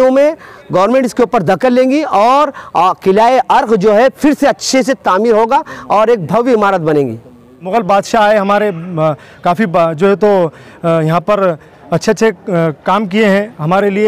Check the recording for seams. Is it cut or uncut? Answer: cut